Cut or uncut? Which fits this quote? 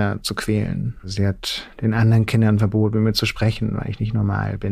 cut